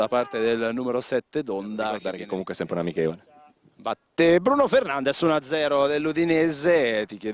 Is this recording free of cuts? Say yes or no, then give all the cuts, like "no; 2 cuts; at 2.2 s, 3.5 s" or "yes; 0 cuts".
no; 1 cut; at 1.6 s